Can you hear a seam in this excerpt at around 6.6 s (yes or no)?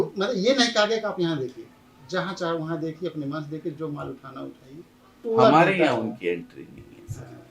no